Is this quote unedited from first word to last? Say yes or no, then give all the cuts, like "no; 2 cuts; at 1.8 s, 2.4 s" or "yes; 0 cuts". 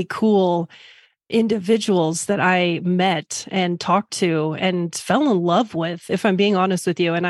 yes; 0 cuts